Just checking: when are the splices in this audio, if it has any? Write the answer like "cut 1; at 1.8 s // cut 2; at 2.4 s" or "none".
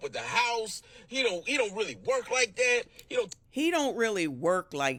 none